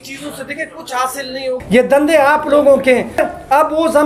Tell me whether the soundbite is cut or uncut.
cut